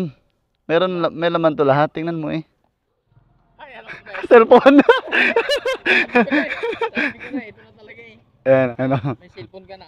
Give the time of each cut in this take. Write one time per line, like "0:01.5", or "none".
0:03.4
0:08.7